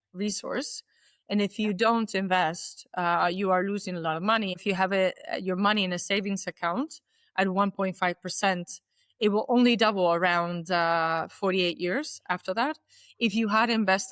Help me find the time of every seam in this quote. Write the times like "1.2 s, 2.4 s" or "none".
4.6 s